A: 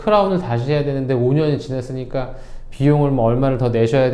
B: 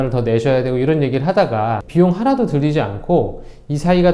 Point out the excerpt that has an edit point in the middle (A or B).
B